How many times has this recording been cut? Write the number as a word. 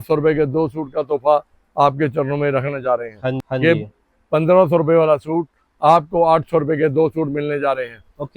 one